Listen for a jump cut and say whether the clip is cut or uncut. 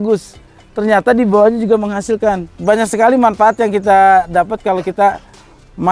cut